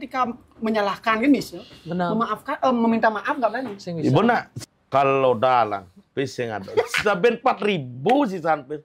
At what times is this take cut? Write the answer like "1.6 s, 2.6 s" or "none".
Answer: 4.5 s